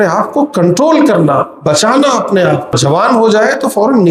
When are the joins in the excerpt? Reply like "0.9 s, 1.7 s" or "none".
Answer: 2.8 s